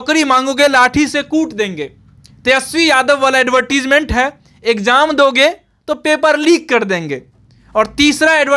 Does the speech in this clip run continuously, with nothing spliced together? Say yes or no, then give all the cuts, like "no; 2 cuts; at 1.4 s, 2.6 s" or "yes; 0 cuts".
yes; 0 cuts